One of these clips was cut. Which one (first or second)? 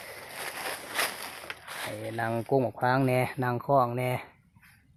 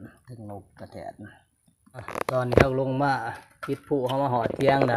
second